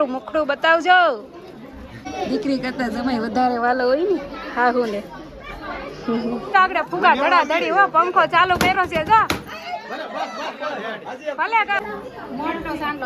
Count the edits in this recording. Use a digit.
3